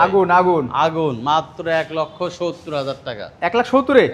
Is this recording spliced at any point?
no; 0 cuts

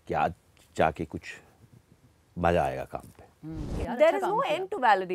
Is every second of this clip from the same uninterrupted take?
no; 1 cut; at 3.7 s

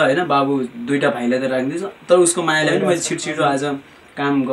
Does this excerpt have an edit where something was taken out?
no; 0 cuts

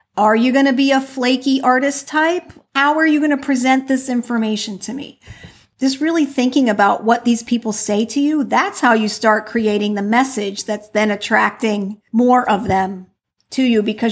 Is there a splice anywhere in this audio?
yes; 2 cuts; at 5.6 s, 12.0 s

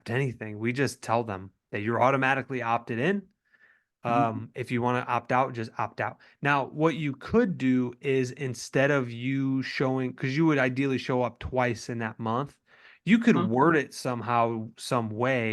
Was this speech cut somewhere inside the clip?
no; 0 cuts

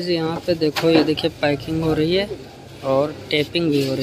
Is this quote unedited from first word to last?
yes; 0 cuts

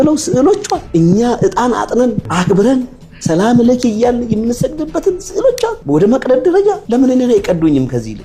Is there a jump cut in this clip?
no; 0 cuts

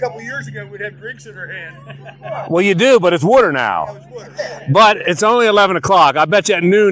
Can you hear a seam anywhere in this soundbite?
no; 0 cuts

